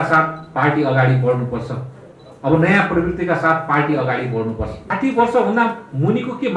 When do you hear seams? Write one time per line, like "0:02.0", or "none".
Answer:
0:04.9